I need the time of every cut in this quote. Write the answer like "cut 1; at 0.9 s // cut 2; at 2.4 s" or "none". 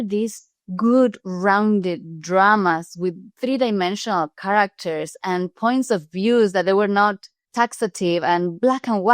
cut 1; at 3.3 s